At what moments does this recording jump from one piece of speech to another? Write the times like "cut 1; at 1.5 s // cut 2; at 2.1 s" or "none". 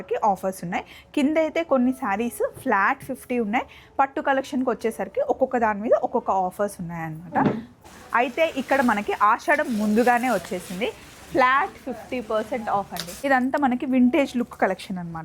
cut 1; at 7.9 s // cut 2; at 13.0 s